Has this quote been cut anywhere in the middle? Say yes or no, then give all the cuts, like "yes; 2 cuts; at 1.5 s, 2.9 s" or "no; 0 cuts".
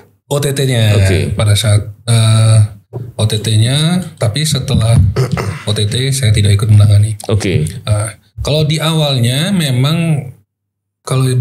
no; 0 cuts